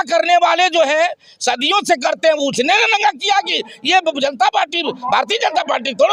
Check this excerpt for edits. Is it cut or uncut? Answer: uncut